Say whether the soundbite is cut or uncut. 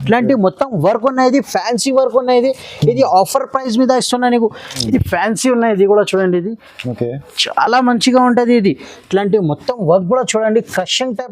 cut